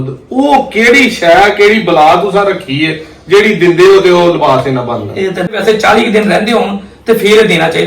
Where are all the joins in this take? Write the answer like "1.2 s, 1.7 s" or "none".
5.5 s